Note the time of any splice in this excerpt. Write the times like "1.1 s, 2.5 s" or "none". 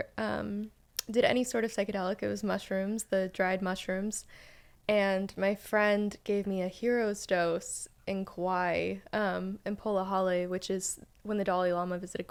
none

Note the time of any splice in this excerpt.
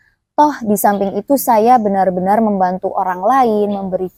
none

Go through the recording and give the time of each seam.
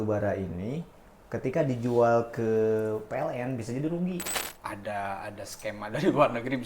4.4 s

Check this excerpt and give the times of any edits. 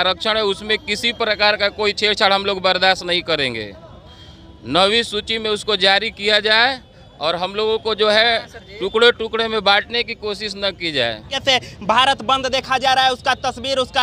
none

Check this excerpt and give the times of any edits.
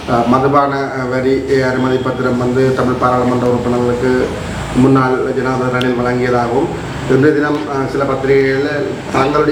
none

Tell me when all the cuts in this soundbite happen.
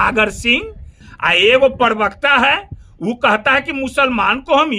1.0 s

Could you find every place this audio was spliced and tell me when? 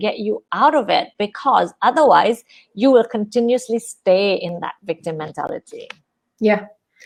none

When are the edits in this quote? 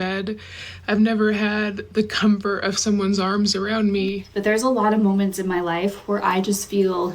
4.3 s

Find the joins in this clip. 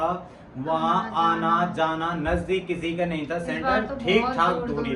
none

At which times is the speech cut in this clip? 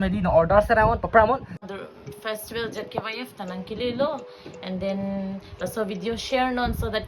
1.7 s

